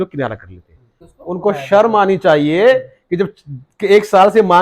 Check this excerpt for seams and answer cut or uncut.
cut